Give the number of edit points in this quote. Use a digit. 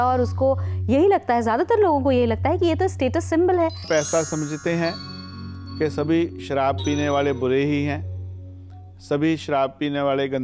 1